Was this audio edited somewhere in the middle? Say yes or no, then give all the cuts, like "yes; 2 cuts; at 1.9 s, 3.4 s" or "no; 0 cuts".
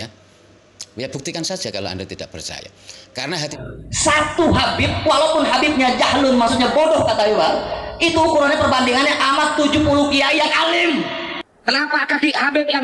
yes; 1 cut; at 3.5 s